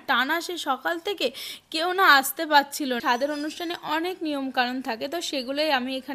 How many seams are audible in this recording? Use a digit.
1